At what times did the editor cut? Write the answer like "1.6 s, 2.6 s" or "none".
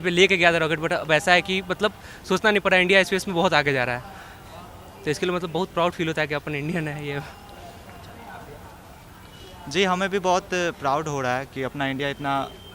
none

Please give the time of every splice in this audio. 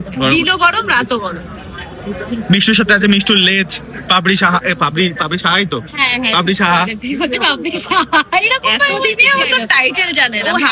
none

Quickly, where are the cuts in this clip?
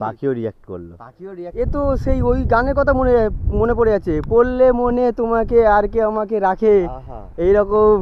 1.5 s

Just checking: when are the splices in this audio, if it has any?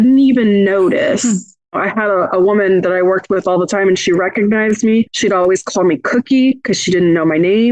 1.7 s, 5.1 s

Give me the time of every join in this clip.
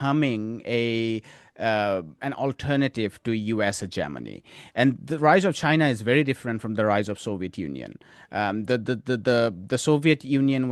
none

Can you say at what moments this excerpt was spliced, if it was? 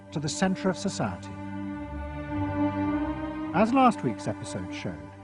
none

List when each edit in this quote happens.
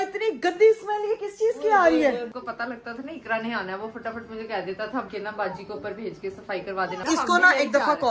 2.3 s, 5.1 s, 7.0 s

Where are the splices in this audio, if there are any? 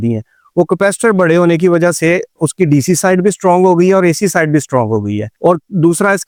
none

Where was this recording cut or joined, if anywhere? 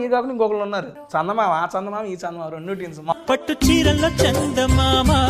1.0 s, 3.1 s

